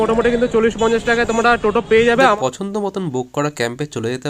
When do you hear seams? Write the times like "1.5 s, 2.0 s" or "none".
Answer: 2.2 s